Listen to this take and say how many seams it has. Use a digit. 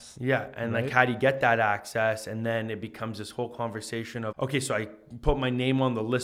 1